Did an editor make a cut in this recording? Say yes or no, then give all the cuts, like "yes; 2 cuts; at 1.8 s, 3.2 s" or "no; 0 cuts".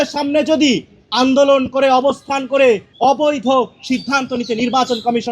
yes; 1 cut; at 2.9 s